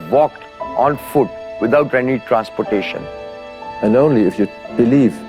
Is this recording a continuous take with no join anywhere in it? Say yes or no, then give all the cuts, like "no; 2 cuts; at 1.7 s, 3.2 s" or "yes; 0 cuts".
no; 1 cut; at 3.5 s